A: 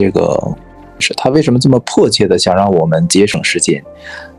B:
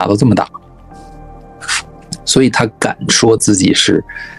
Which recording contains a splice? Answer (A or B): A